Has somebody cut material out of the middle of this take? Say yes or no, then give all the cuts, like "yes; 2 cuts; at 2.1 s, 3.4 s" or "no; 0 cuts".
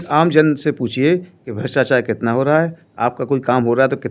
no; 0 cuts